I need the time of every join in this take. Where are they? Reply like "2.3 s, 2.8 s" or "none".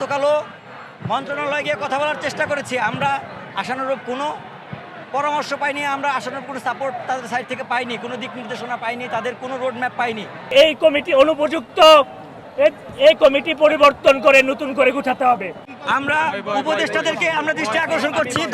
10.5 s, 15.5 s